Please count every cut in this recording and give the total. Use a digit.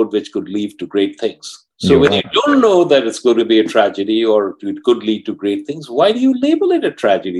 0